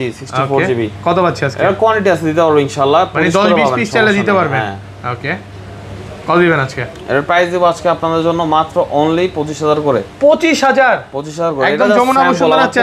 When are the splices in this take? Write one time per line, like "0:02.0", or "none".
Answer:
none